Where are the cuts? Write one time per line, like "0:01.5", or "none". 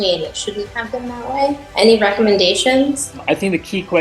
0:03.1